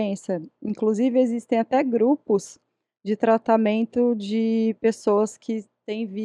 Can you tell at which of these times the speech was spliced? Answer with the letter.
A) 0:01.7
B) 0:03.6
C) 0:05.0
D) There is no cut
D